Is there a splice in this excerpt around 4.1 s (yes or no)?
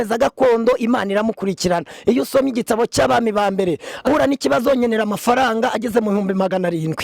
yes